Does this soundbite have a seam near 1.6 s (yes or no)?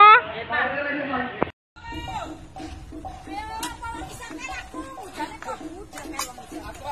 yes